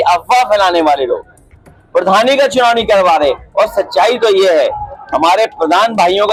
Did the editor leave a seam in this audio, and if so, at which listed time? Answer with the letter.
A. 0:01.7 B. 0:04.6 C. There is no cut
C